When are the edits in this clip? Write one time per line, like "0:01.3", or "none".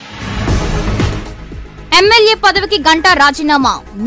0:00.9